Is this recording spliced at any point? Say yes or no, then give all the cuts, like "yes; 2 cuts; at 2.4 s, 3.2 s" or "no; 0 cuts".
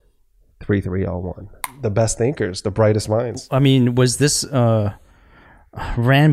yes; 1 cut; at 1.7 s